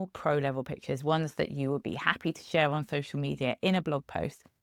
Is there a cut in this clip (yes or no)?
no